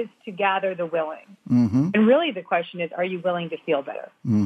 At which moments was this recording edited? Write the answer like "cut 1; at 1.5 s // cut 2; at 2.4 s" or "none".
cut 1; at 1.9 s